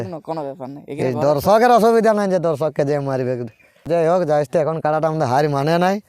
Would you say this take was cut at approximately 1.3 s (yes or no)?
no